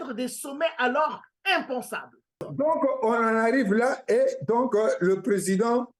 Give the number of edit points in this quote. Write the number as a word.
one